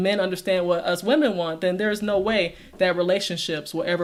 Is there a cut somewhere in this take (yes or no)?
no